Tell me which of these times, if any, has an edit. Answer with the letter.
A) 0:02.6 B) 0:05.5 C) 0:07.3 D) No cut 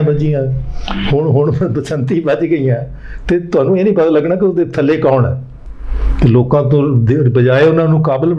D